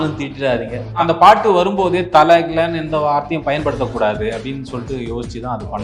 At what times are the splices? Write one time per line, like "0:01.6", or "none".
0:01.0